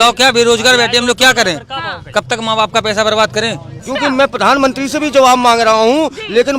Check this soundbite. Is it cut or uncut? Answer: cut